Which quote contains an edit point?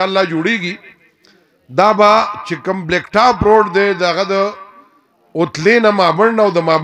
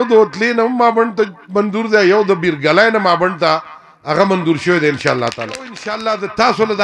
second; 1 cut; at 5.9 s

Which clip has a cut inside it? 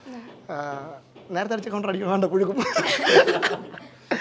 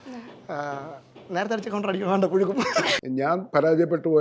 second; 1 cut; at 3.0 s

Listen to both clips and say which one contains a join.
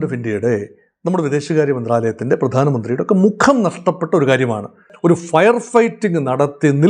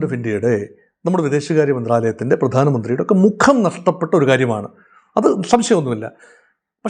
first; 1 cut; at 4.9 s

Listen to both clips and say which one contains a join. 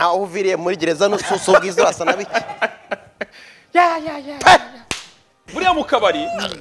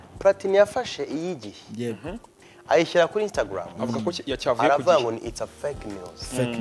first; 1 cut; at 5.5 s

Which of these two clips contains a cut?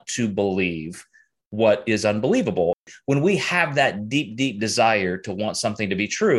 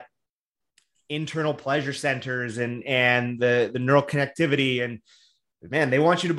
first; 1 cut; at 2.8 s

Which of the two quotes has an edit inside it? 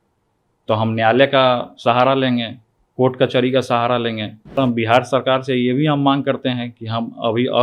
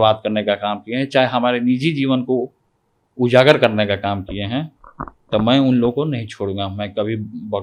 first; 1 cut; at 4.6 s

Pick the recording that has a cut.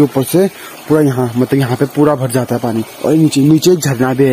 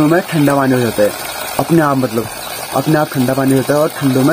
first; 1 cut; at 2.9 s

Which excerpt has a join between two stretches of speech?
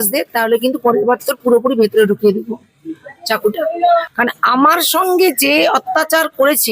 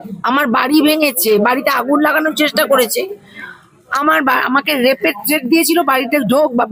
first; 1 cut; at 4.1 s

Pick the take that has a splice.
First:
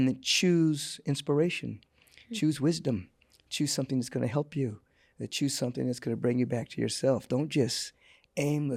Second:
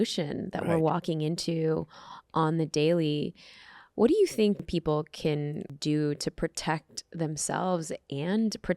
second; 2 cuts; at 4.6 s, 5.7 s

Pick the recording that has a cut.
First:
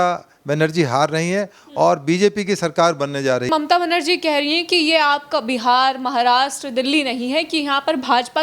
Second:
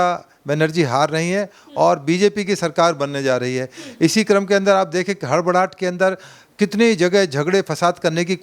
first; 1 cut; at 3.5 s

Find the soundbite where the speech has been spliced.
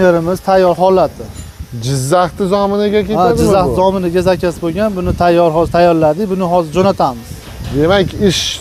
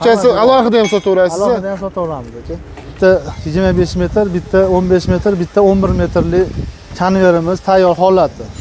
second; 1 cut; at 2.8 s

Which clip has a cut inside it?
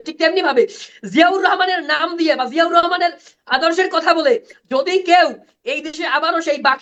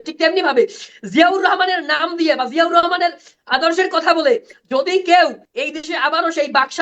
second; 1 cut; at 5.5 s

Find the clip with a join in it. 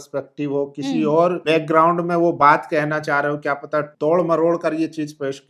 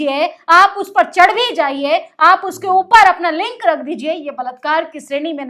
first; 2 cuts; at 1.4 s, 3.9 s

